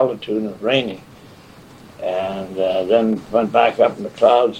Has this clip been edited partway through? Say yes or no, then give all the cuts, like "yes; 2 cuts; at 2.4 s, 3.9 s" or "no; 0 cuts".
no; 0 cuts